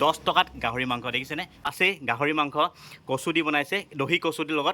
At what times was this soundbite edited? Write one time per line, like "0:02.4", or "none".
0:01.7

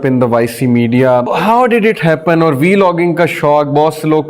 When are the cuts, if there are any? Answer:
0:01.3

